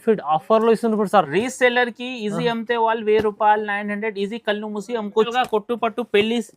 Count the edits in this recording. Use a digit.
1